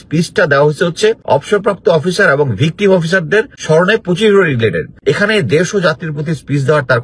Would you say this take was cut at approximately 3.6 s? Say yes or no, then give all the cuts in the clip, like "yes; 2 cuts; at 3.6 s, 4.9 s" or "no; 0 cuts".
yes; 3 cuts; at 1.2 s, 3.6 s, 4.9 s